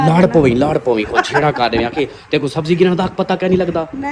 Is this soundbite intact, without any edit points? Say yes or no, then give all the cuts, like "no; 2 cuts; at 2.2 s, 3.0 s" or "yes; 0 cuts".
yes; 0 cuts